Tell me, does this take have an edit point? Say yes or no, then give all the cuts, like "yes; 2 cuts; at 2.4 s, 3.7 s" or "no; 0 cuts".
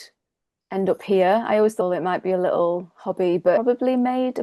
yes; 2 cuts; at 1.8 s, 3.6 s